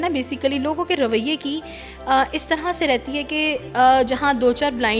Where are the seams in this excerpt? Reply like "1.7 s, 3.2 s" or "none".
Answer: none